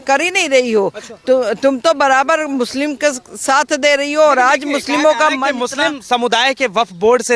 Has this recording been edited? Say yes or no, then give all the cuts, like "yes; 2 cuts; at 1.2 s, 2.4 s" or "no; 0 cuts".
no; 0 cuts